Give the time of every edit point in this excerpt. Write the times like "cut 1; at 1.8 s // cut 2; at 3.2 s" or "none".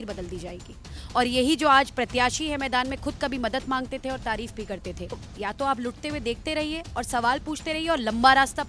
cut 1; at 1.0 s // cut 2; at 5.3 s